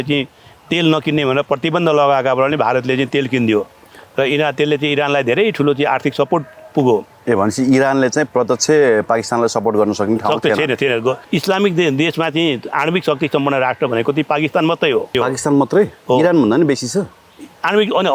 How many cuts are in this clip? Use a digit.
2